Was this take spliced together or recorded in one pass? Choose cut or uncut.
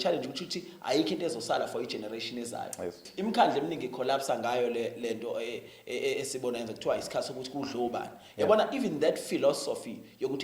cut